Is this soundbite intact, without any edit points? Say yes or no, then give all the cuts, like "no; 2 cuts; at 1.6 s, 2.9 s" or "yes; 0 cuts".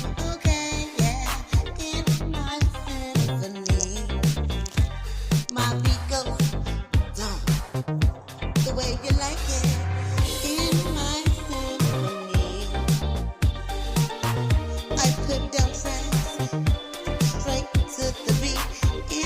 yes; 0 cuts